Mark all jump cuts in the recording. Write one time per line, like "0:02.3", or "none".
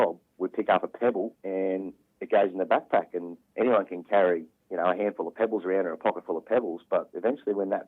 0:01.4
0:03.4